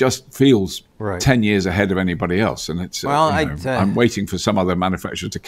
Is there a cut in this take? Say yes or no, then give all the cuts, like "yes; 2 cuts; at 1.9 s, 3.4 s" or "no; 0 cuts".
no; 0 cuts